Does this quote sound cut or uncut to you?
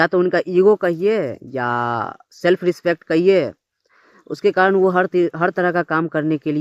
uncut